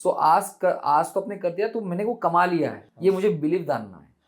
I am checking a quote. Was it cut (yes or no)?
yes